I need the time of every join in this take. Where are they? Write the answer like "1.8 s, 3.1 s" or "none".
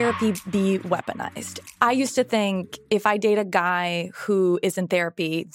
1.6 s